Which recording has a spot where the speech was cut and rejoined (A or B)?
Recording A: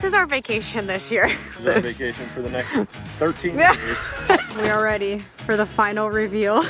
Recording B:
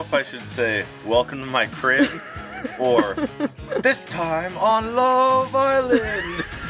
A